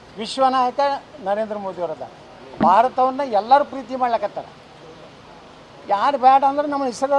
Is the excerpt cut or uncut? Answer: cut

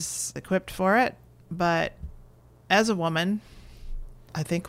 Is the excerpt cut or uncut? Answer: uncut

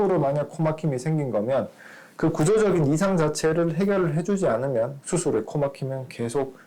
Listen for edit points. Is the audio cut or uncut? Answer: uncut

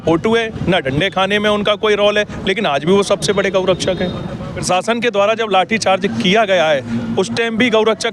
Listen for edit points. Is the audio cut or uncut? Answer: cut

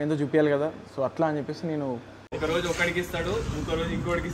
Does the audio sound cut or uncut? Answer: cut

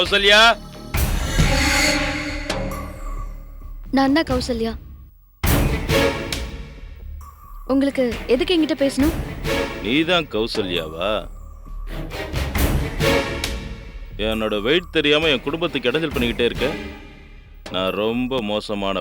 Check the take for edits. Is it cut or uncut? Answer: uncut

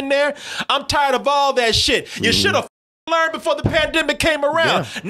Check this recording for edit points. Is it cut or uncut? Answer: uncut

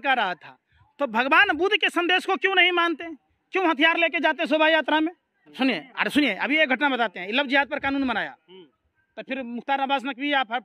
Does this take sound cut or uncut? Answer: cut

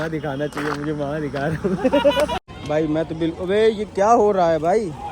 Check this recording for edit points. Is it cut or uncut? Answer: cut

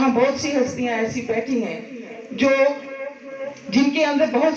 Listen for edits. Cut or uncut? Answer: uncut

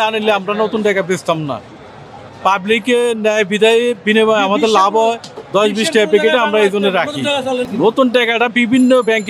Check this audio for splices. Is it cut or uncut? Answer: uncut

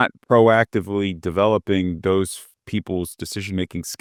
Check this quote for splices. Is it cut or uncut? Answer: uncut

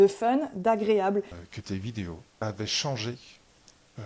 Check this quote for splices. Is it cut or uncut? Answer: cut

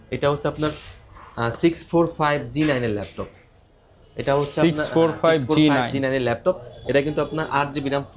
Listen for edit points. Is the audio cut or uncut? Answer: uncut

